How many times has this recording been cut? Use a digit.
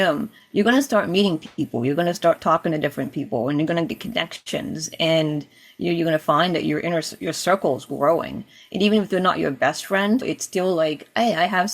1